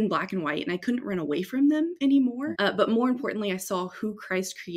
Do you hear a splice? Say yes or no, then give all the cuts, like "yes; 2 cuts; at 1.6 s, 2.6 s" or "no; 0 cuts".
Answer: yes; 1 cut; at 2.5 s